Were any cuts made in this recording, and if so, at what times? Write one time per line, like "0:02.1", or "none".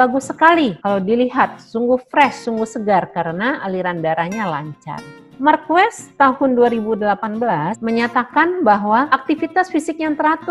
0:07.8
0:09.1